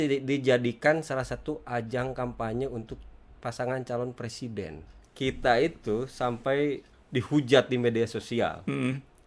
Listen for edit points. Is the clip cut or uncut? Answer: cut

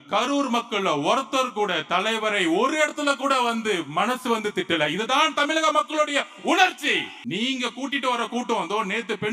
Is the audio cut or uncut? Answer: cut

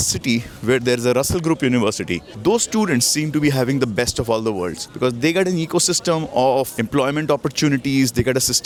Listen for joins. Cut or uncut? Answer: uncut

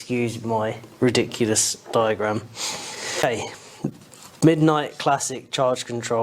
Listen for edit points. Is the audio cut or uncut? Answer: cut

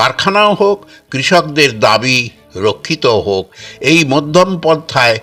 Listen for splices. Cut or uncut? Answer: uncut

